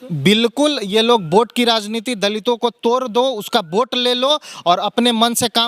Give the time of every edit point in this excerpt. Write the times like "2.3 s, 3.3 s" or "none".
none